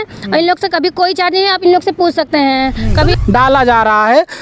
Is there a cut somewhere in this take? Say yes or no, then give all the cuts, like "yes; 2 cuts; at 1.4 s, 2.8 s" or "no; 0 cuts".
yes; 1 cut; at 3.1 s